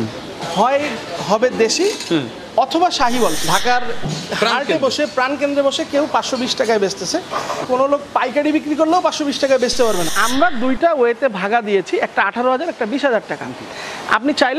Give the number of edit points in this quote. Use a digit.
3